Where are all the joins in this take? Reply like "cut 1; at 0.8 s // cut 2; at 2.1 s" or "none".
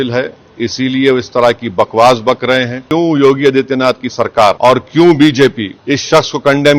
cut 1; at 2.8 s // cut 2; at 4.6 s // cut 3; at 5.7 s